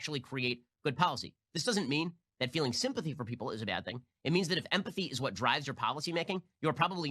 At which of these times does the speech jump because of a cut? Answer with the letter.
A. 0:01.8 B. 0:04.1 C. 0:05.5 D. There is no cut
A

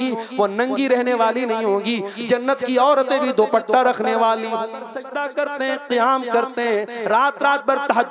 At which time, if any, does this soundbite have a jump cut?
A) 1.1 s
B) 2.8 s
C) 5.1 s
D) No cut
C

